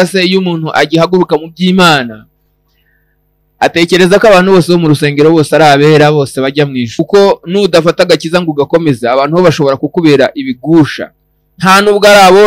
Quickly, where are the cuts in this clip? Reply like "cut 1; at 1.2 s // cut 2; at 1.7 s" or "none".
cut 1; at 7.0 s